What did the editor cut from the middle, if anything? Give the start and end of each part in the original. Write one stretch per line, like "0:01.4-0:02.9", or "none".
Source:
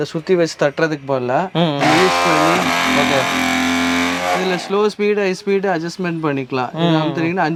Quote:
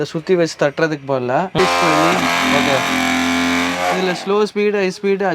0:01.6-0:02.0

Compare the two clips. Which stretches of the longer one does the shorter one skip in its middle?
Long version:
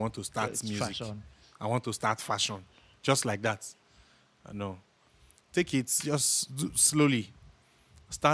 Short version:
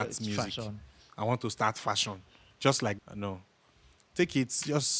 0:03.4-0:04.3

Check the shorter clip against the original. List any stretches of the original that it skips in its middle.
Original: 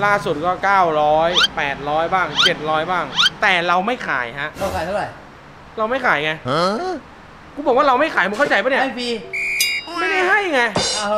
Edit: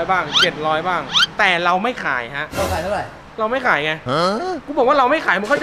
0:05.2-0:05.6
0:07.0-0:07.5

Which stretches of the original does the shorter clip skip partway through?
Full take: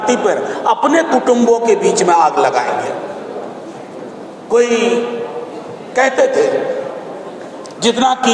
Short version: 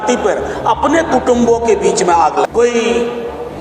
0:02.5-0:04.4

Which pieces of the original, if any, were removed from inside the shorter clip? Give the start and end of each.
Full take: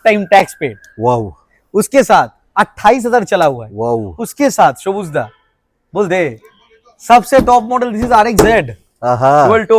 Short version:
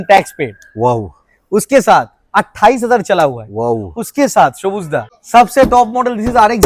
0:05.4-0:06.9

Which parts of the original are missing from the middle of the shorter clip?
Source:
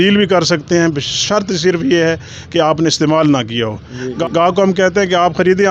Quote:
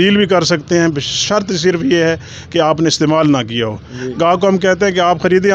0:04.1-0:04.3

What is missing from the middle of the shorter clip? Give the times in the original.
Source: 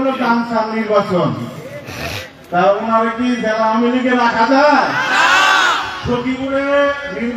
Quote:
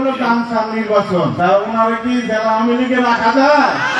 0:01.3-0:02.5

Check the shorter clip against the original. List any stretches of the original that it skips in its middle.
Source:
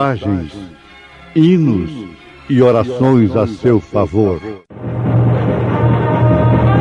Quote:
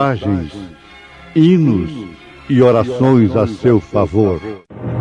none

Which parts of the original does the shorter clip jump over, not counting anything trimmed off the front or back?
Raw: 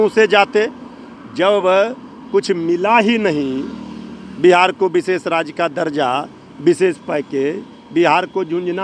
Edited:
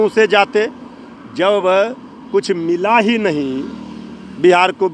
none

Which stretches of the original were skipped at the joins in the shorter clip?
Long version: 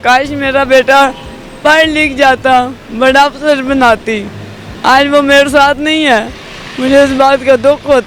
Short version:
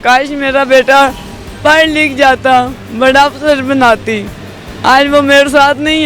none

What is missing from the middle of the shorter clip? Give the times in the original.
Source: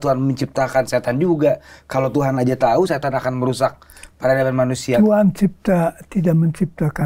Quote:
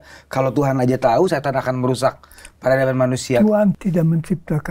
0:05.4-0:06.1

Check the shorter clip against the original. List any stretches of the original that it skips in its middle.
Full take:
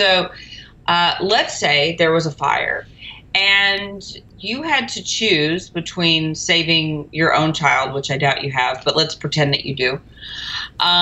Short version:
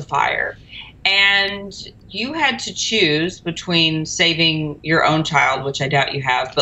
none

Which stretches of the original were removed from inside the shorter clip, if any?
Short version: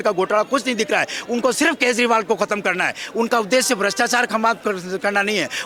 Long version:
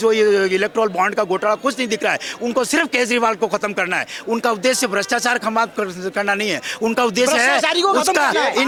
none

